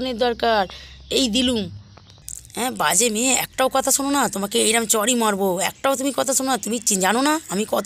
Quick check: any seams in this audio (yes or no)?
no